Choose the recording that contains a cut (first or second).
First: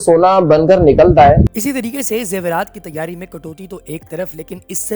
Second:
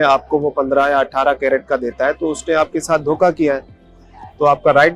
first